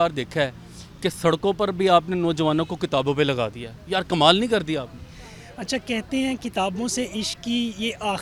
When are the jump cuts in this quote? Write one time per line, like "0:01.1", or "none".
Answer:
none

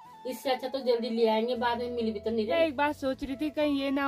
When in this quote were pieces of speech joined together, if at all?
0:02.6

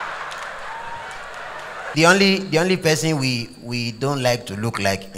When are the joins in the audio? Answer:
0:01.9

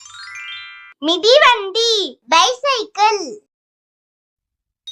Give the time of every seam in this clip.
0:00.9

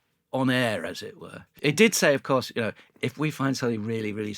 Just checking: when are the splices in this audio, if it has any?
0:01.6

